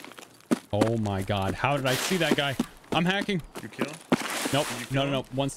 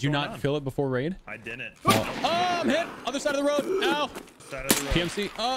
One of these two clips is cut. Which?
second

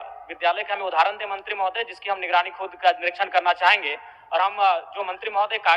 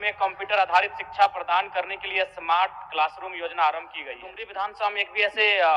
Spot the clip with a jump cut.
second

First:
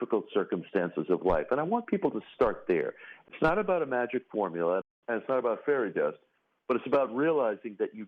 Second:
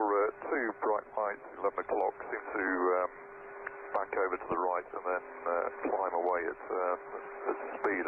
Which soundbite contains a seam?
first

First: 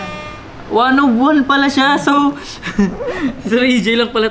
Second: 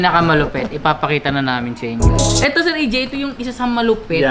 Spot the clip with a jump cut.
second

